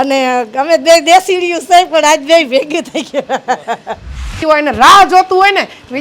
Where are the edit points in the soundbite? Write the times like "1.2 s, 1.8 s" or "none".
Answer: 4.4 s